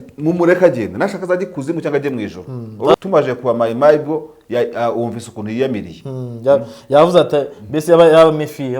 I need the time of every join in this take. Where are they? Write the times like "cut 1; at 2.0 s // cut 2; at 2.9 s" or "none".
cut 1; at 2.9 s

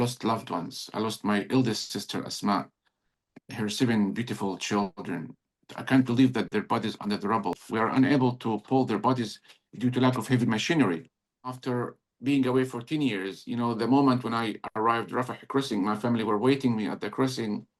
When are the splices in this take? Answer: cut 1; at 7.6 s // cut 2; at 11.6 s

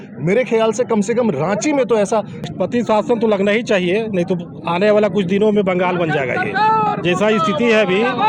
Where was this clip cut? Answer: cut 1; at 2.5 s

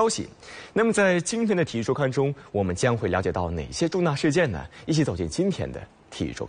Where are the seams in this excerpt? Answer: none

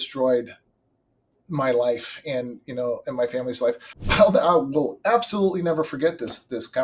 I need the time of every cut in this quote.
cut 1; at 3.9 s

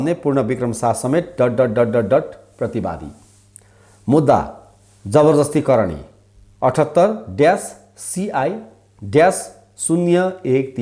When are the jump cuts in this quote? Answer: none

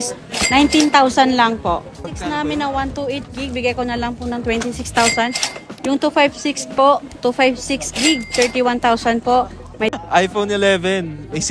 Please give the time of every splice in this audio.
cut 1; at 2.1 s // cut 2; at 9.9 s

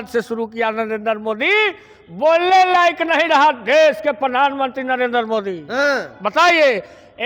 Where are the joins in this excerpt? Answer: none

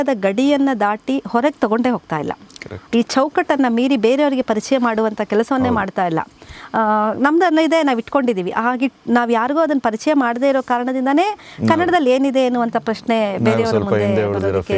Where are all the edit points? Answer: none

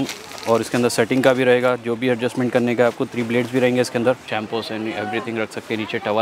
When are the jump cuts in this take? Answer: cut 1; at 4.2 s

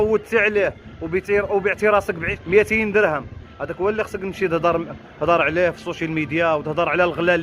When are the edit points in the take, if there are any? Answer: none

